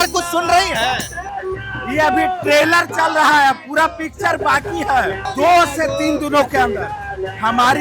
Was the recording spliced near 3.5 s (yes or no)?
no